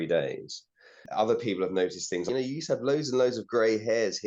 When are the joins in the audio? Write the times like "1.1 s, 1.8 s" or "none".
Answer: 1.0 s, 2.3 s